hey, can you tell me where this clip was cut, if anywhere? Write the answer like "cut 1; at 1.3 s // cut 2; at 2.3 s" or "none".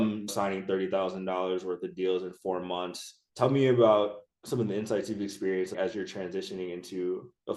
none